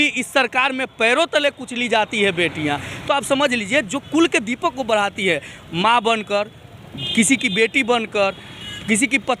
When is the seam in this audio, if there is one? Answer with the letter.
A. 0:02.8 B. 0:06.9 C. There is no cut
C